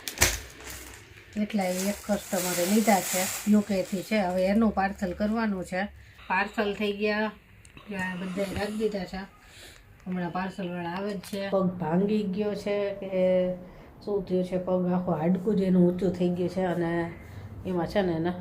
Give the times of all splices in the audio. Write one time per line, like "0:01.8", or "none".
0:06.2
0:11.5